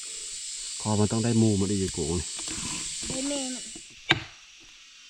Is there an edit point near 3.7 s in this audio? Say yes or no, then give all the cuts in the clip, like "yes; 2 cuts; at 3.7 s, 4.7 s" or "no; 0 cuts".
yes; 1 cut; at 3.7 s